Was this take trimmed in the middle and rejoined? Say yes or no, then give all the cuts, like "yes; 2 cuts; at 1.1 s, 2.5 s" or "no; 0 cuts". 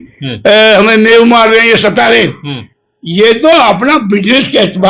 no; 0 cuts